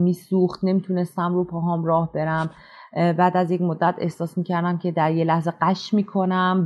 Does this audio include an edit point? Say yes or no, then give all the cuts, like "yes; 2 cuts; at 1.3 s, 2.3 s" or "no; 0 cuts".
no; 0 cuts